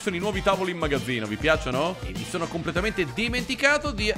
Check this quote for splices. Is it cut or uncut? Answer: cut